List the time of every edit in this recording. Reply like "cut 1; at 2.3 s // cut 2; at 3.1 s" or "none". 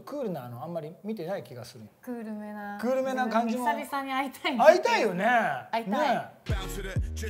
cut 1; at 1.8 s